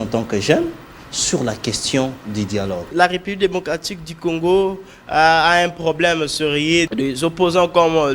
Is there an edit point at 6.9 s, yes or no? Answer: yes